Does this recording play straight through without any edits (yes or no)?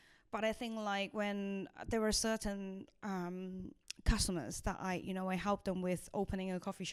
yes